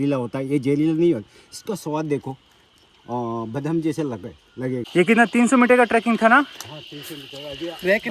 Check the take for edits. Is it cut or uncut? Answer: cut